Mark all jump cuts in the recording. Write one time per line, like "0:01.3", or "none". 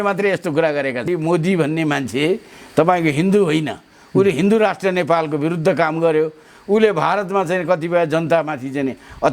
0:01.0